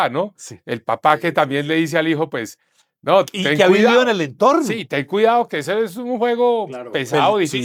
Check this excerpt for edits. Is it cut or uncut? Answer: uncut